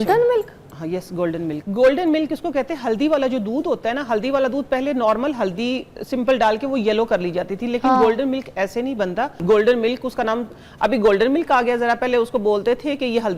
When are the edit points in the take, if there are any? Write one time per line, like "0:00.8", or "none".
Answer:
0:01.5
0:09.4